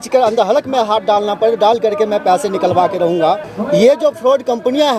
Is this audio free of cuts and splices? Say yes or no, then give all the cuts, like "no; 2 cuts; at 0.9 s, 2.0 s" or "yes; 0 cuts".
no; 1 cut; at 3.5 s